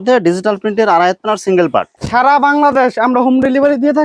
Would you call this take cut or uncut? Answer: cut